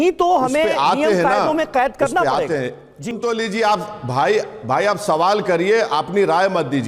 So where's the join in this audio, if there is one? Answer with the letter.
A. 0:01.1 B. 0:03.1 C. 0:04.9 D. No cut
B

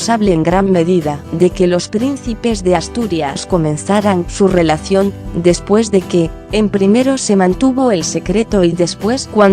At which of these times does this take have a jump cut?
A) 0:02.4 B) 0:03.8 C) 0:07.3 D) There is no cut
A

